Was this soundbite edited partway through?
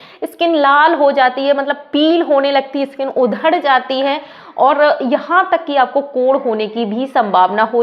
no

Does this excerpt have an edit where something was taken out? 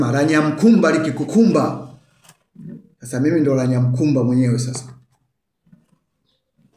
no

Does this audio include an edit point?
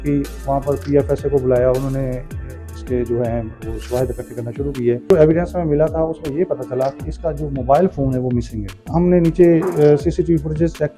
yes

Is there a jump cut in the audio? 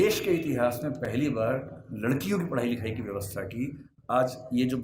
no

